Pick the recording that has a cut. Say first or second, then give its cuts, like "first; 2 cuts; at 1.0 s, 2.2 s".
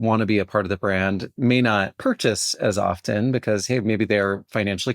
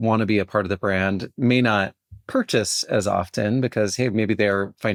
first; 1 cut; at 1.9 s